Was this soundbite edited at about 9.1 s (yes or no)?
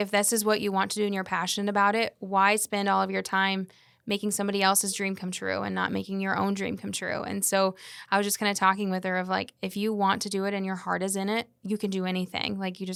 no